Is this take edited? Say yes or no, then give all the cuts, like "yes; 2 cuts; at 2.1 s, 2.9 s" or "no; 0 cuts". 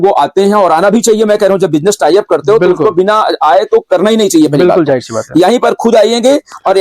no; 0 cuts